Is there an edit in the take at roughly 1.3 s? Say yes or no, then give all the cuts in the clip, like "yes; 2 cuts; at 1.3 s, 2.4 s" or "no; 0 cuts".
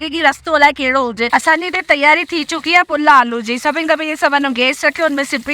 yes; 1 cut; at 1.3 s